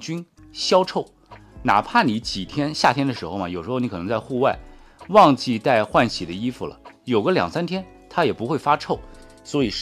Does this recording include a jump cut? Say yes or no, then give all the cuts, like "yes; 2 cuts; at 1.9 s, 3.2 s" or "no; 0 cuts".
no; 0 cuts